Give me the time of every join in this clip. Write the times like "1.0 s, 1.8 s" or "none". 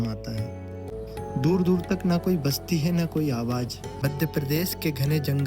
0.9 s, 3.9 s